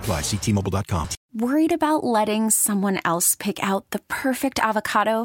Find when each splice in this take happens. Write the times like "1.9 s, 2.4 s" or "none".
1.2 s